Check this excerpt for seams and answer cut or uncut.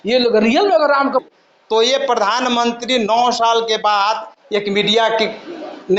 cut